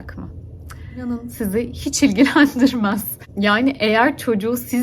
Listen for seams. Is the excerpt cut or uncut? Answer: cut